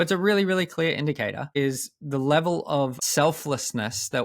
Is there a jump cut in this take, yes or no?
yes